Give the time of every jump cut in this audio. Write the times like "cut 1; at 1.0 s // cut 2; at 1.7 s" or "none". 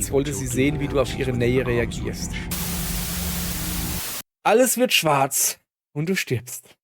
cut 1; at 4.0 s